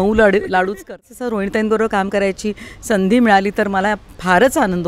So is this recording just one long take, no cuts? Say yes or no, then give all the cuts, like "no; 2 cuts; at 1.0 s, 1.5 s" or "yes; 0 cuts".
no; 1 cut; at 1.0 s